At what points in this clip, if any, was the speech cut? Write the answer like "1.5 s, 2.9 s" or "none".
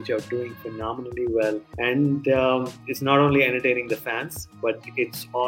1.7 s, 2.8 s